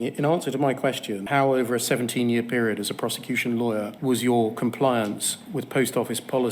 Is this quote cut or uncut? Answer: cut